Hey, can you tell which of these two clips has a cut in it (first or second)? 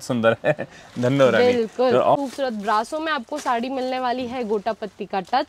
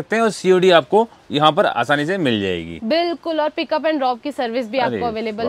first